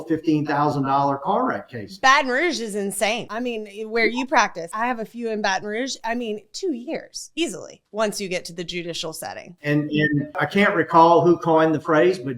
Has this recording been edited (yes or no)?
yes